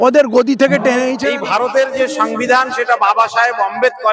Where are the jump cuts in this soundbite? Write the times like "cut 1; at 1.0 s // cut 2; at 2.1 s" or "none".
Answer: cut 1; at 1.3 s